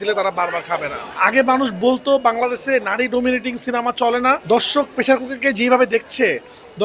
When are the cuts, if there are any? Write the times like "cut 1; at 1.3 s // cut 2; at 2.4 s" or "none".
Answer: cut 1; at 1.2 s // cut 2; at 4.4 s

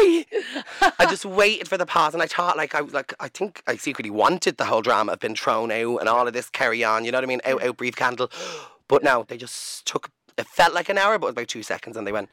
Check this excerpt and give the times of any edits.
cut 1; at 10.2 s

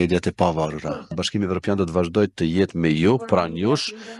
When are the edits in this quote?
cut 1; at 1.1 s

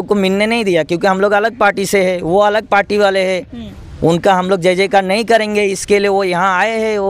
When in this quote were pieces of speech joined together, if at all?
none

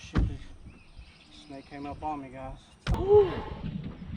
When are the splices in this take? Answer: cut 1; at 3.0 s

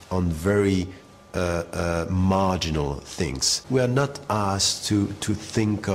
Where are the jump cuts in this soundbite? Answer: cut 1; at 3.5 s

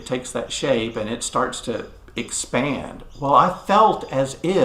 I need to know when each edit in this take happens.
cut 1; at 3.6 s

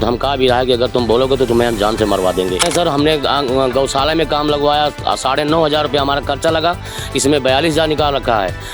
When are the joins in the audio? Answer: cut 1; at 2.7 s

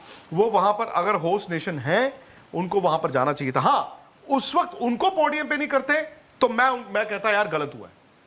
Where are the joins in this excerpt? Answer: none

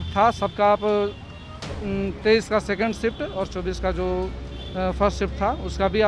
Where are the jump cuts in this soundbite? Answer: none

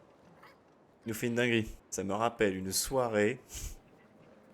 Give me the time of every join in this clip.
cut 1; at 0.9 s // cut 2; at 1.8 s

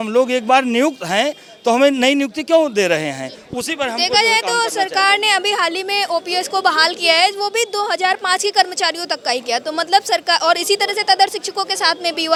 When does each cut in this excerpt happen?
none

